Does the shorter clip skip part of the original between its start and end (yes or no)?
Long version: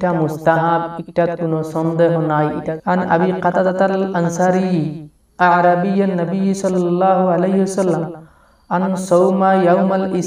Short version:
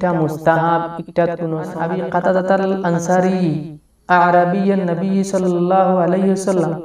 yes